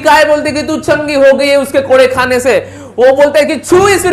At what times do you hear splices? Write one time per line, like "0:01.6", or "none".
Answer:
none